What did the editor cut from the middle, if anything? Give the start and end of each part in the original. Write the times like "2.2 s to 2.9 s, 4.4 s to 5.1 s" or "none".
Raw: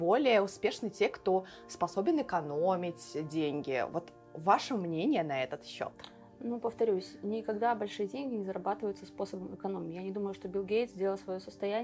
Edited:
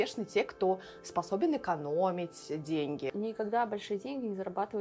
3.7 s to 7.2 s